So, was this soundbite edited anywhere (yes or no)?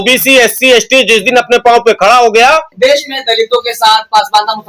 no